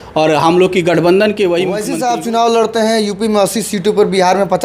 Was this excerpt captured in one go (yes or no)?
no